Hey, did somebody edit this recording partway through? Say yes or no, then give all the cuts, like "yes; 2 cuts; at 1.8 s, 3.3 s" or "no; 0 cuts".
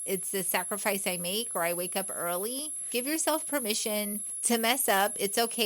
yes; 2 cuts; at 2.9 s, 4.3 s